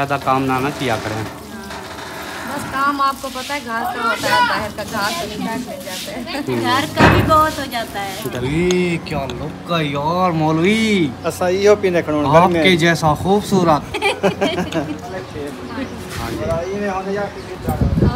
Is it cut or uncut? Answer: cut